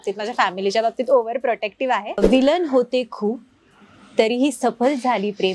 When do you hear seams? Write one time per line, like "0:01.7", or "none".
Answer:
0:02.2